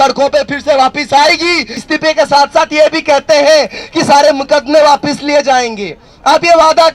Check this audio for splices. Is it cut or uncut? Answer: cut